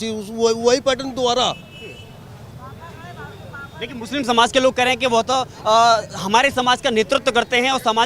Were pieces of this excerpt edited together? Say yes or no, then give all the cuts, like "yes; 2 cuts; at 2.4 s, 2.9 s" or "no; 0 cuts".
no; 0 cuts